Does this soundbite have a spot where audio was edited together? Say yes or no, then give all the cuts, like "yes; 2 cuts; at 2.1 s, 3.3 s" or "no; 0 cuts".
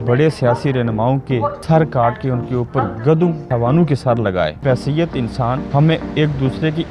yes; 4 cuts; at 1.6 s, 3.5 s, 4.6 s, 5.7 s